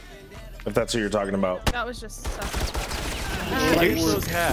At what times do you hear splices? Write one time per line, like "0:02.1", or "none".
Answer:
0:03.4